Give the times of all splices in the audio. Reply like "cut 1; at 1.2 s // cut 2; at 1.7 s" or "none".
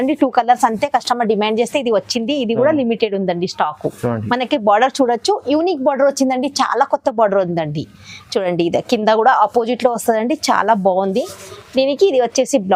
none